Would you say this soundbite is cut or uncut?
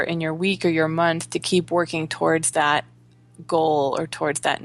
uncut